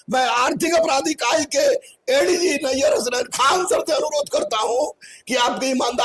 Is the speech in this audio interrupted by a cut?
no; 0 cuts

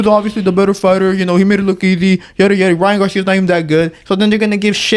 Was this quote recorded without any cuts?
yes; 0 cuts

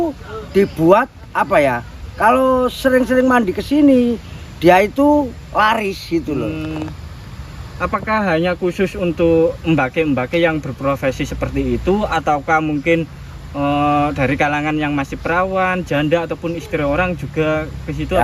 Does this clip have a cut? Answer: no; 0 cuts

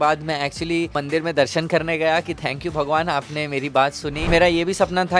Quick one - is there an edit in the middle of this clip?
yes; 2 cuts; at 1.0 s, 4.3 s

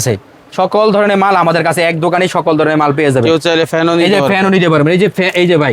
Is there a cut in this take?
no; 0 cuts

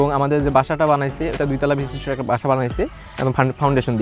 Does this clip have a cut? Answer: no; 0 cuts

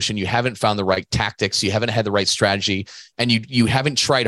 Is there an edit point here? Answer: no; 0 cuts

